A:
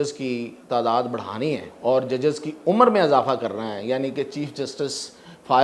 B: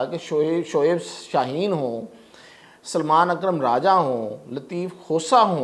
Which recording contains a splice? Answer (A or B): A